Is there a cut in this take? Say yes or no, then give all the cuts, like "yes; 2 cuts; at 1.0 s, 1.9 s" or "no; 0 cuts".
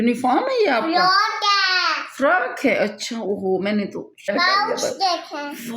yes; 1 cut; at 4.2 s